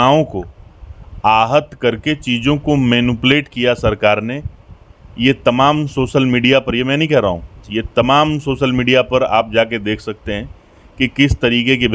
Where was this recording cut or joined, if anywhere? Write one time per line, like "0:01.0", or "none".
none